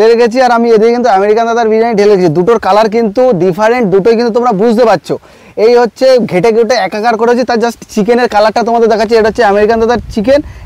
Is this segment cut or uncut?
uncut